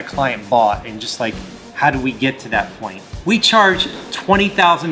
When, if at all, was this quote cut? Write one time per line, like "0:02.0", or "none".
0:03.1

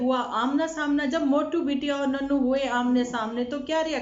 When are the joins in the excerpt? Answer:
none

